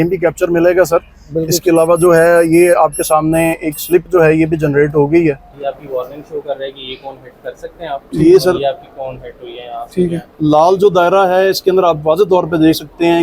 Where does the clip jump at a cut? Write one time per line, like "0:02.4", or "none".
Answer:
0:05.5